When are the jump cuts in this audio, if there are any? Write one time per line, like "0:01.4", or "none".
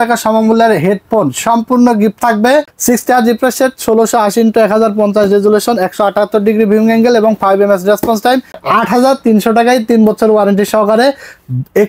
0:02.7
0:08.5